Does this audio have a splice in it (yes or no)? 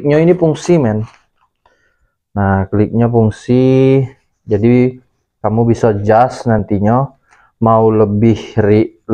no